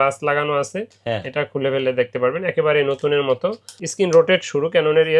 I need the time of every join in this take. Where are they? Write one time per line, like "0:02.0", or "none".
0:03.8